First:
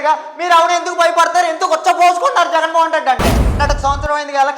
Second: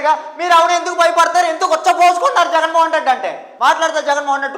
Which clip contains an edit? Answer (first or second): first